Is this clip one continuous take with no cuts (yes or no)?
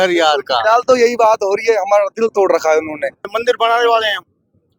no